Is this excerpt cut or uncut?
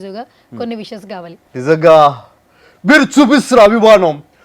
cut